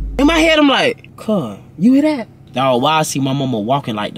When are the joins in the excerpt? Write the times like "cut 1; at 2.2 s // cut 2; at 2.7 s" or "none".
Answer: cut 1; at 1.1 s // cut 2; at 2.4 s